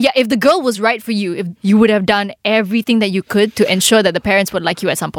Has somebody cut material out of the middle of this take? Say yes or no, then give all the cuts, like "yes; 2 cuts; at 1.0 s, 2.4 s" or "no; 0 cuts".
yes; 1 cut; at 1.5 s